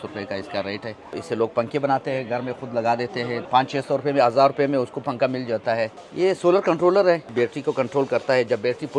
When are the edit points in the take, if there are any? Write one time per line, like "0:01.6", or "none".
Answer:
0:01.1
0:03.4
0:06.0
0:07.3

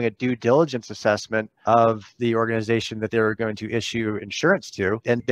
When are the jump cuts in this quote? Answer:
0:01.5

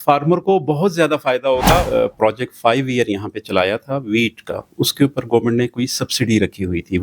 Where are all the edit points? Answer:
0:01.9

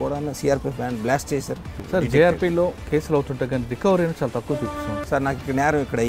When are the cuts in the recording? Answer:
0:01.8
0:02.8
0:05.0

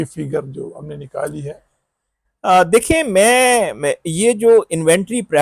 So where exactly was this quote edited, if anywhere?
none

